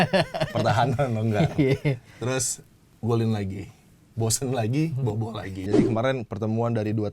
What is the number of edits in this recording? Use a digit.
1